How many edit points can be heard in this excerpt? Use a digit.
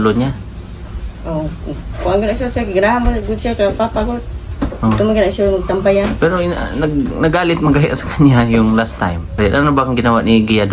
1